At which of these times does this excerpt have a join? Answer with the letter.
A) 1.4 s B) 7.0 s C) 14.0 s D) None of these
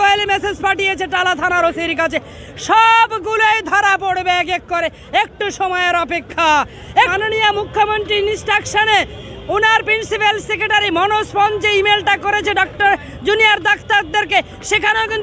B